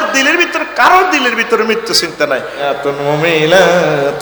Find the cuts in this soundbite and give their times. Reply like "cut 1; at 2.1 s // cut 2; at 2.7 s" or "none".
cut 1; at 2.8 s